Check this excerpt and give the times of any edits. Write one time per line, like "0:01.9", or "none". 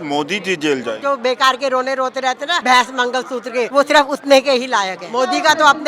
0:01.0
0:02.6
0:03.7
0:05.0